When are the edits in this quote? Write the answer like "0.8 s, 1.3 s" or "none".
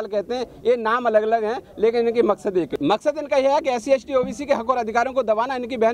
2.7 s

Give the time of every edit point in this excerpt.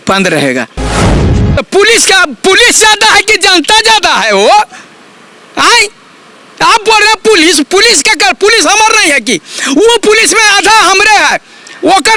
1.1 s

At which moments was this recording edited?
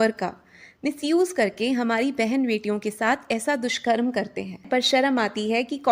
4.6 s

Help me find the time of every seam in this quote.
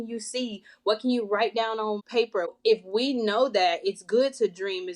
2.4 s

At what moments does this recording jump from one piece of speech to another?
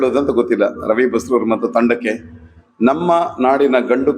none

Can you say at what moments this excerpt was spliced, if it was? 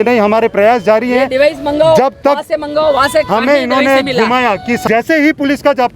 4.8 s

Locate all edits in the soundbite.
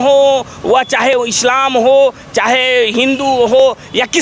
none

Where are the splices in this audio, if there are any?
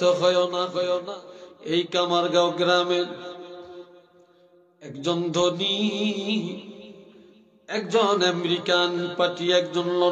0.9 s

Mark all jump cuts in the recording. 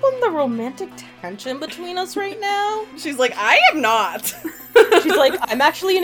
3.0 s

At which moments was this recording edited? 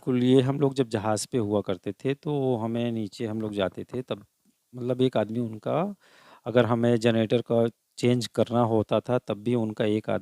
none

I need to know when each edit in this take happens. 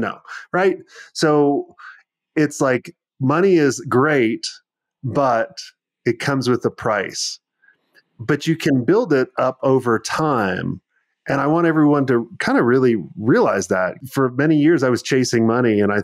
13.9 s

